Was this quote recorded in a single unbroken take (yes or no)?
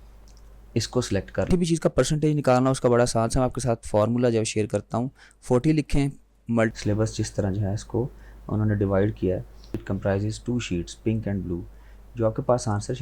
no